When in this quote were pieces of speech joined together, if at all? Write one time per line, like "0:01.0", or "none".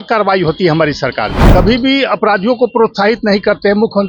0:01.4